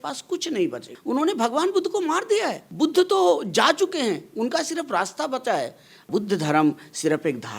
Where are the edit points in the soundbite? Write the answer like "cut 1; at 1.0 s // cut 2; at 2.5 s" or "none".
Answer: cut 1; at 0.9 s // cut 2; at 2.6 s // cut 3; at 6.1 s